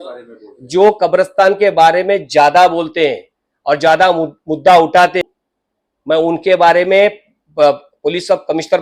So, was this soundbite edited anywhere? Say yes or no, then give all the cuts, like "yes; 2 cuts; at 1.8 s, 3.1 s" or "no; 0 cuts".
yes; 1 cut; at 5.2 s